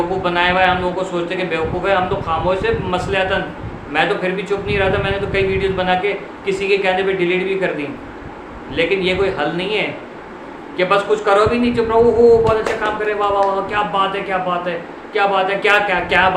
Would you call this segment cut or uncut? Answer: uncut